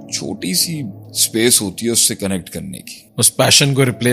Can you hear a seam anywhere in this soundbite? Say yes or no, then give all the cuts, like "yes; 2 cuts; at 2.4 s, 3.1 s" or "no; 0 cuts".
yes; 2 cuts; at 1.1 s, 3.0 s